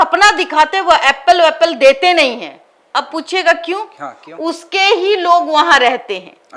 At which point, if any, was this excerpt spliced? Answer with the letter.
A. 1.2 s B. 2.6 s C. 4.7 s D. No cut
D